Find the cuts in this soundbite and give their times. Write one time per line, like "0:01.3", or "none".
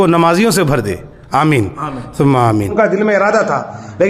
0:02.7